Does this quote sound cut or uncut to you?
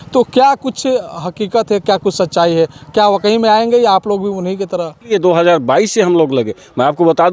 cut